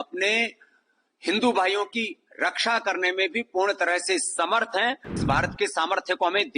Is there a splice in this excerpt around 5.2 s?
yes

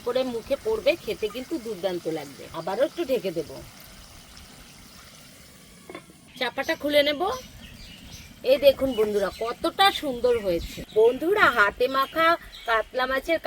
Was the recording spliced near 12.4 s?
no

